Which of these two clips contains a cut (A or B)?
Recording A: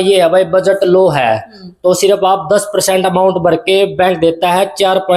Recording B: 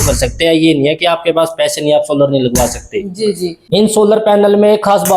B